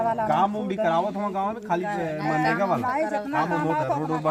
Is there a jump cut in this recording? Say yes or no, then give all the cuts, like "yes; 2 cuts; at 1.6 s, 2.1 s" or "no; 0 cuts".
no; 0 cuts